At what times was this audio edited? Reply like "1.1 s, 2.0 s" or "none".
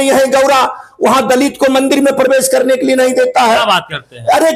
none

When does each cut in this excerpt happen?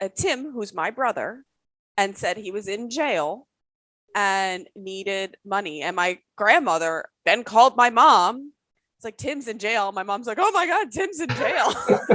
7.1 s

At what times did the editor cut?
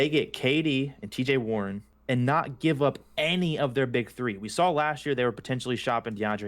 1.9 s

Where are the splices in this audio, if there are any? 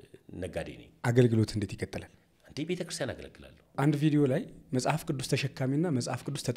3.7 s

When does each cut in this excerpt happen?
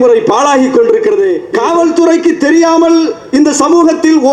1.5 s

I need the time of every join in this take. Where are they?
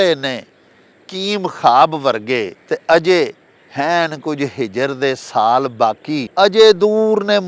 2.6 s, 6.3 s

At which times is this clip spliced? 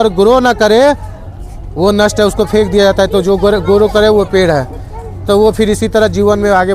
none

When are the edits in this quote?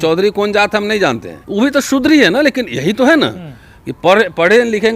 1.3 s

